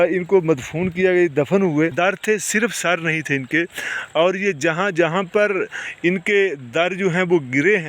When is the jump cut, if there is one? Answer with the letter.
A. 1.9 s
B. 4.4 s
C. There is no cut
A